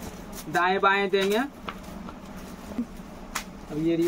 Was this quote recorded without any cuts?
no; 1 cut; at 2.8 s

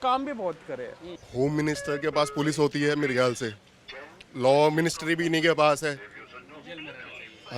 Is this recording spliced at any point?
yes; 1 cut; at 1.2 s

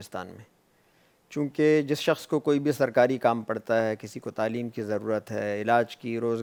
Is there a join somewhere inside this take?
no; 0 cuts

